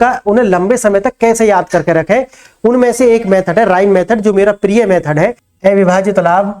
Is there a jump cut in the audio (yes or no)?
yes